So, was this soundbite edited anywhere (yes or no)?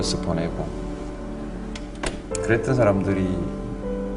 no